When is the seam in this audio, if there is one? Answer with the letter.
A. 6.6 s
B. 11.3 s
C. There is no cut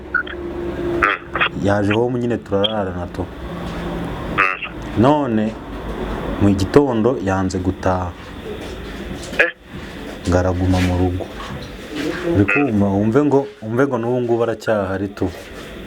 C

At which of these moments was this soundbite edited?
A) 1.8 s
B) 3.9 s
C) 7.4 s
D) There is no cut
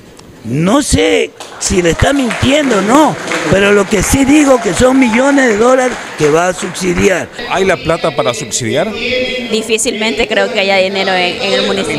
C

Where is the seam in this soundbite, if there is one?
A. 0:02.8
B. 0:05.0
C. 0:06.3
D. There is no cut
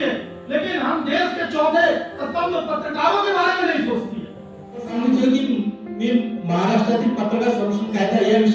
B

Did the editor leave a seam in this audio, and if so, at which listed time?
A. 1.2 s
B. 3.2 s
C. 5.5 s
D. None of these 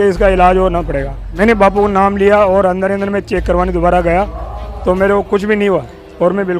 A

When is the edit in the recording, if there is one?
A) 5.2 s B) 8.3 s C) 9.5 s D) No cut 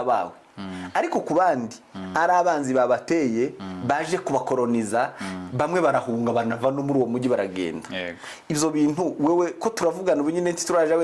D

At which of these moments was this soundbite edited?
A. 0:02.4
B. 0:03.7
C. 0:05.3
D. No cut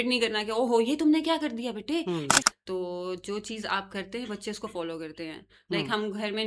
A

